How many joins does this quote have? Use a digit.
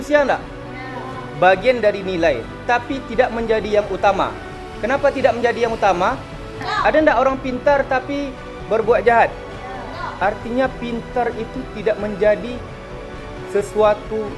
0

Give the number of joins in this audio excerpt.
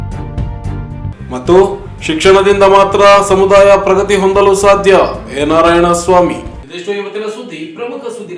0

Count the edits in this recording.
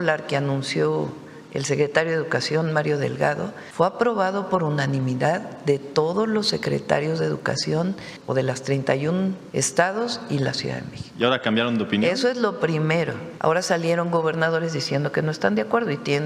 4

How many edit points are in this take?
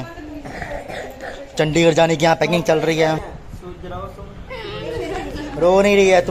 1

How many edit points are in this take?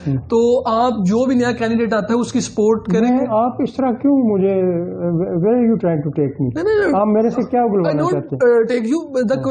0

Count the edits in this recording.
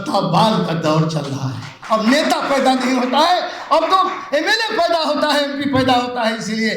1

